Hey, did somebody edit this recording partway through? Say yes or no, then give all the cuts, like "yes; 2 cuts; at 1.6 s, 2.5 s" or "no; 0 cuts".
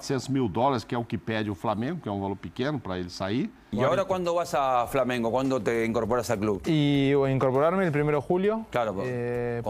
yes; 1 cut; at 3.6 s